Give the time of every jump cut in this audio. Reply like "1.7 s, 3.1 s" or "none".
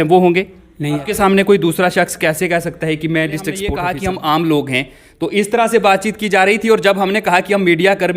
1.1 s, 3.7 s